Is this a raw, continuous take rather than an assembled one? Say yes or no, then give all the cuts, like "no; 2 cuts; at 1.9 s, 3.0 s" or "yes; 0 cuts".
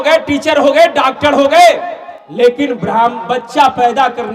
yes; 0 cuts